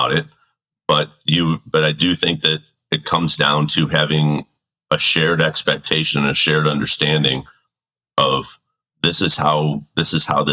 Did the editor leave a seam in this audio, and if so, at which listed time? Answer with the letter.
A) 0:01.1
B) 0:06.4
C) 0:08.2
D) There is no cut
D